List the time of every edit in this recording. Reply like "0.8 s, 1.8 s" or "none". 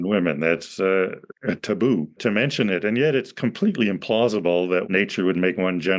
1.3 s, 2.2 s, 4.9 s